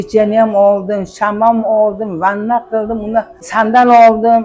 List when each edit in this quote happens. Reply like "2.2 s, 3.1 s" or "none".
3.4 s